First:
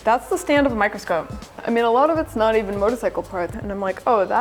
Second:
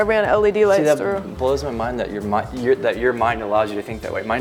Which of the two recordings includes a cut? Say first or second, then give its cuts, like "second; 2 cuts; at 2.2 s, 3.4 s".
first; 2 cuts; at 1.6 s, 3.5 s